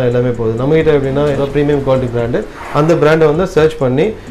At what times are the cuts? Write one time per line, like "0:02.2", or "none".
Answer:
0:01.4